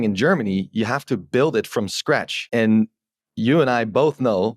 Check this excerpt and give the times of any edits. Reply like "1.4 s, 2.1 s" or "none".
2.4 s